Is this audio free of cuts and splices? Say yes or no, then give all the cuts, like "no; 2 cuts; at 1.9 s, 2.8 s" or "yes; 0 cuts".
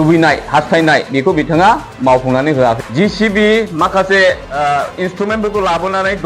no; 2 cuts; at 2.8 s, 4.5 s